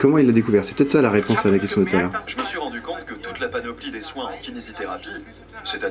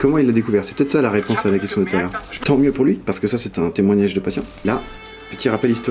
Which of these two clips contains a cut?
second; 2 cuts; at 2.4 s, 4.6 s

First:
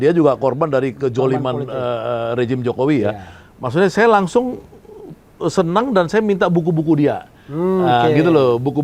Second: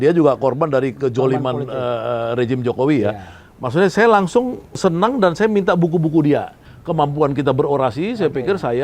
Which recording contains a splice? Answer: second; 2 cuts; at 4.8 s, 6.7 s

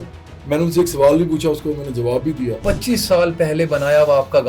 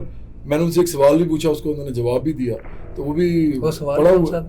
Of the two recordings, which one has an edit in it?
first; 1 cut; at 2.6 s

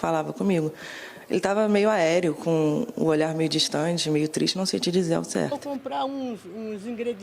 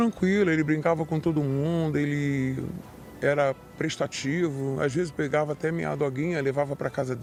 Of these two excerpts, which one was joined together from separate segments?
first; 1 cut; at 5.6 s

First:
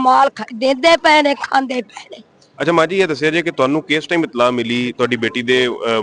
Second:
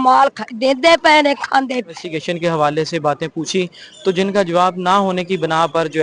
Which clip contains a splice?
second; 1 cut; at 2.1 s

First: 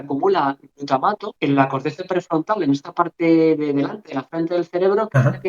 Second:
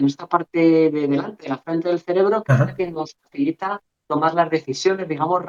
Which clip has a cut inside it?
first; 1 cut; at 1.3 s

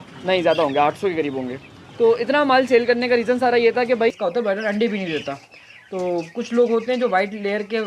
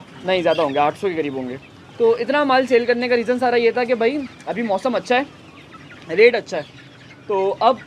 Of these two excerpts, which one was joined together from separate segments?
first; 1 cut; at 4.1 s

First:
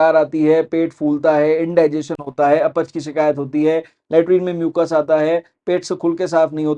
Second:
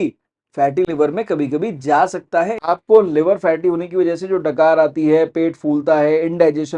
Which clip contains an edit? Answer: second; 1 cut; at 2.6 s

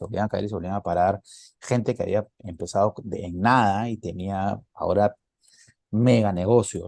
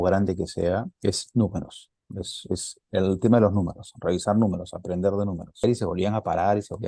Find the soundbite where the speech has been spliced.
second; 1 cut; at 5.6 s

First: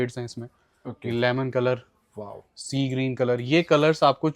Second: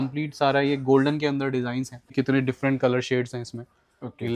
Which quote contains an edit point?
second; 1 cut; at 2.1 s

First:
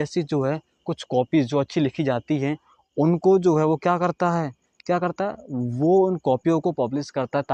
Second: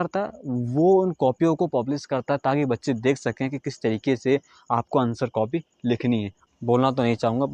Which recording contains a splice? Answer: second; 1 cut; at 6.3 s

